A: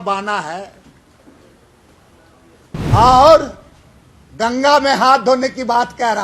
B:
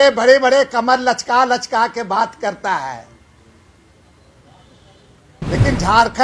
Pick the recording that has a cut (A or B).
A